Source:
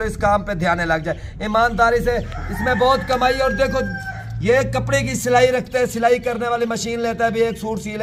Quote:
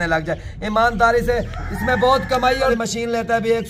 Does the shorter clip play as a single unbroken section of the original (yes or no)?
no